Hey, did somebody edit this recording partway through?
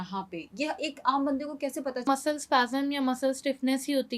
yes; 1 cut; at 2.0 s

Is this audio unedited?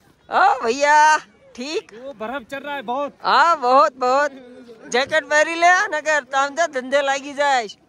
yes; 0 cuts

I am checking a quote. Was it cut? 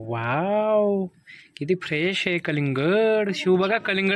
no; 0 cuts

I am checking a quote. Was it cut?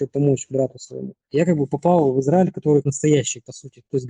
yes; 2 cuts; at 1.2 s, 2.9 s

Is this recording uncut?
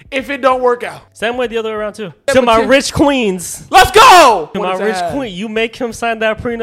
no; 3 cuts; at 1.0 s, 2.2 s, 4.5 s

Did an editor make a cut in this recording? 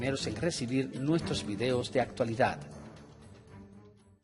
no; 0 cuts

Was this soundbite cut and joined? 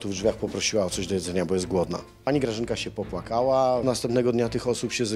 yes; 2 cuts; at 2.1 s, 3.8 s

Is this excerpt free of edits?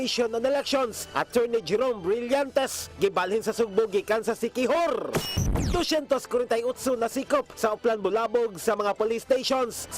no; 1 cut; at 5.3 s

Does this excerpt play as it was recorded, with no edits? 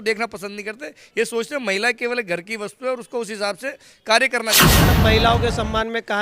no; 1 cut; at 4.7 s

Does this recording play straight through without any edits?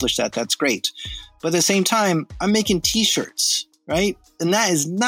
yes; 0 cuts

